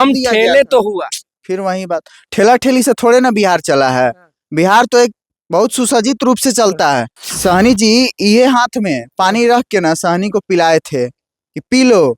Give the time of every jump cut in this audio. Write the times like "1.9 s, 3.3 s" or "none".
7.2 s